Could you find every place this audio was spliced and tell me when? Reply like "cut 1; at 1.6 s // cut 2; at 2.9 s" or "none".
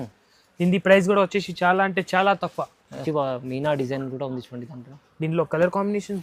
cut 1; at 2.8 s

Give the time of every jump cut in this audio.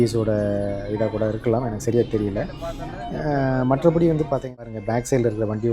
cut 1; at 4.6 s

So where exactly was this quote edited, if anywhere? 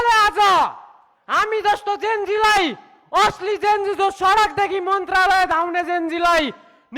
none

